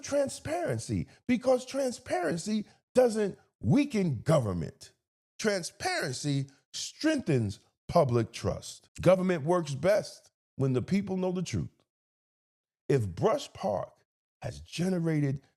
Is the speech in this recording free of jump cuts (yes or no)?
yes